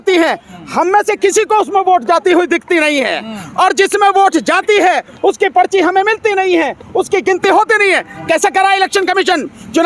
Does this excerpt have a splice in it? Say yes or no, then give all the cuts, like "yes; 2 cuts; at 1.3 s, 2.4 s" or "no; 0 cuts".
no; 0 cuts